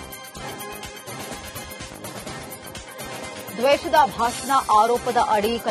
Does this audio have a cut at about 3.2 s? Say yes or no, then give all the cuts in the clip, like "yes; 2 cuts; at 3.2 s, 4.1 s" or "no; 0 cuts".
yes; 1 cut; at 3.2 s